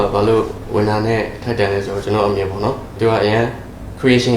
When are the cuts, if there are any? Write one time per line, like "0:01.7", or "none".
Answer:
0:02.9